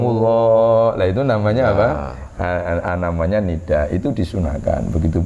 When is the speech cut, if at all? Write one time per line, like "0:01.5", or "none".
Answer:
none

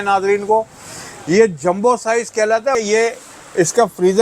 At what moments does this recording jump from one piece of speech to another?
0:02.7

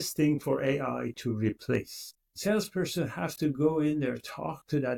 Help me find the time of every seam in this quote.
0:02.1

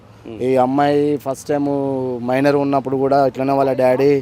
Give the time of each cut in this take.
none

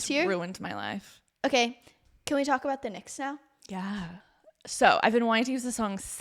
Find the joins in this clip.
0:01.2
0:04.1

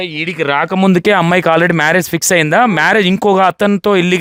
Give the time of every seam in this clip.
none

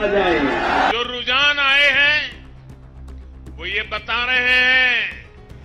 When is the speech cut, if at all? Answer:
0:00.9

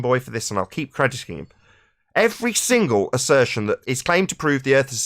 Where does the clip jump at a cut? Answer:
0:03.9

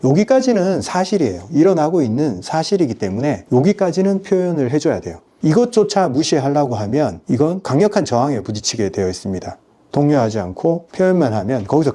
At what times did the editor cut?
0:09.9

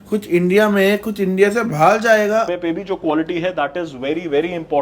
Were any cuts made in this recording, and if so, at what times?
0:02.5

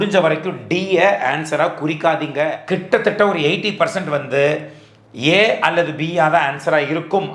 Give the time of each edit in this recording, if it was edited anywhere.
0:02.6

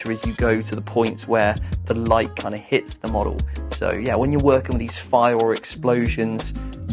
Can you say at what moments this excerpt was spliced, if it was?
none

